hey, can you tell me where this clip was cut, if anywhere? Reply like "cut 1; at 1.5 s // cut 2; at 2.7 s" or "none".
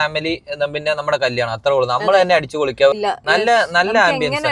cut 1; at 2.9 s